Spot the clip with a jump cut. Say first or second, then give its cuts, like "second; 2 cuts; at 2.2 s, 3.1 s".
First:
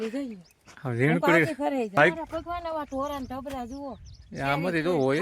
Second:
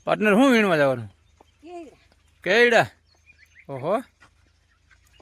first; 1 cut; at 2.0 s